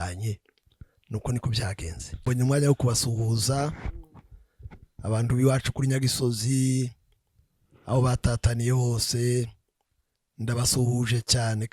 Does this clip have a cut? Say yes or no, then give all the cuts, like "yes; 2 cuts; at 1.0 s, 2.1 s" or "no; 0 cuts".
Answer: yes; 1 cut; at 2.3 s